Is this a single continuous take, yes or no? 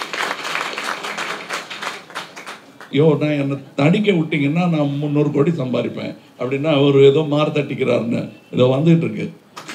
no